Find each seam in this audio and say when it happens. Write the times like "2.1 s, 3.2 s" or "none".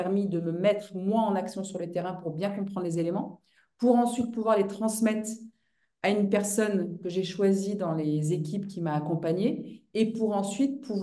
none